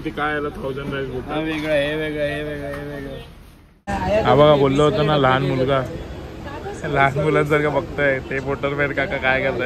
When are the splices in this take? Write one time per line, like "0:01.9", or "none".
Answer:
0:03.8

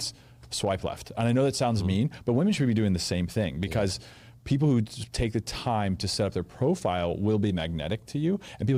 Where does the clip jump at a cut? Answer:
none

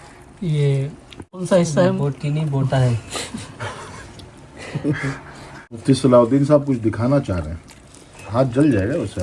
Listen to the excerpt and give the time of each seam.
0:01.4
0:05.8

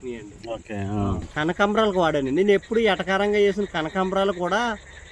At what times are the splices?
0:01.3

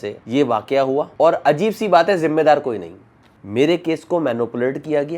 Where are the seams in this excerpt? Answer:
0:03.0

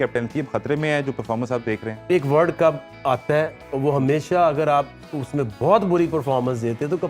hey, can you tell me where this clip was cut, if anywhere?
0:02.0

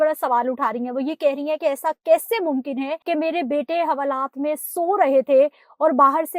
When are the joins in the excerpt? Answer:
0:03.0

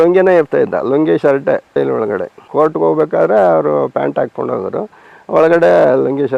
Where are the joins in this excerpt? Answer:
none

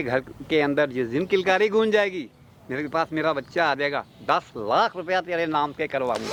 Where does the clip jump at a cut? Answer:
none

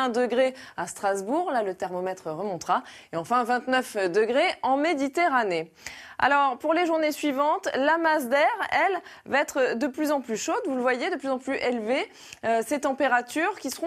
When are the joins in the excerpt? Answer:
0:07.6

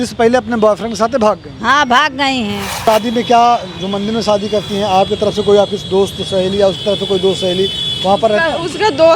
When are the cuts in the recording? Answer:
0:02.8

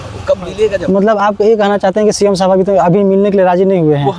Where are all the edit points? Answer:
none

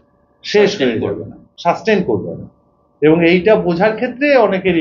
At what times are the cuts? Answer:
none

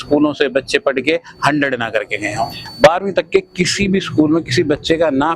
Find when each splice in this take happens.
0:02.6

